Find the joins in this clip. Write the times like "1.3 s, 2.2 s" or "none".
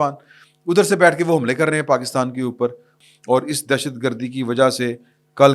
2.9 s